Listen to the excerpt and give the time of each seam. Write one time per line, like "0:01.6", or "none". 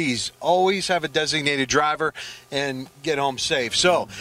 none